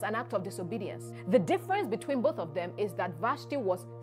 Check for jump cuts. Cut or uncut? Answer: cut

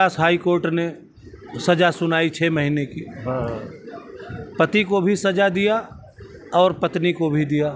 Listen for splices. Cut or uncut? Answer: uncut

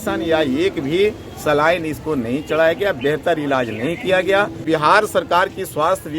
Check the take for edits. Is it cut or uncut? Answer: cut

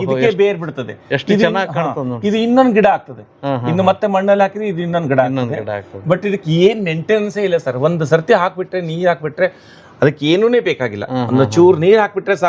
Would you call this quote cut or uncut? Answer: uncut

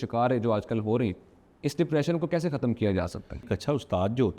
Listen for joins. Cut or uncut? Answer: cut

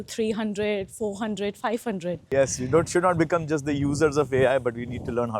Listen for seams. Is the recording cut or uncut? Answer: cut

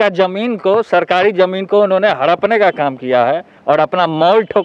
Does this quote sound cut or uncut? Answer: uncut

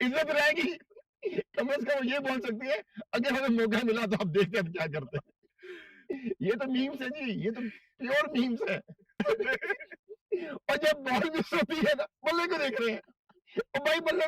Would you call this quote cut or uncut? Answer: cut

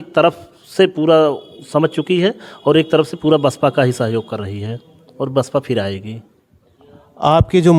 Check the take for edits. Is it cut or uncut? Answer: uncut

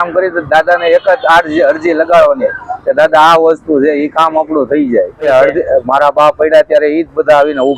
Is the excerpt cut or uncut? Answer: cut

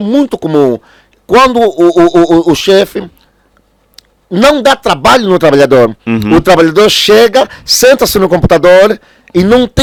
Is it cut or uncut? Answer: uncut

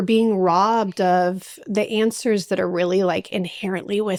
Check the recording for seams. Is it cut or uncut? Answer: uncut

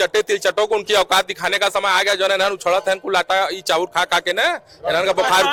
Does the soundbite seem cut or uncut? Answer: uncut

